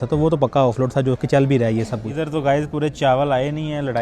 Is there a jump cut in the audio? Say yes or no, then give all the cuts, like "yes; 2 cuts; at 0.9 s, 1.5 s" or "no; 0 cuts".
yes; 1 cut; at 2.1 s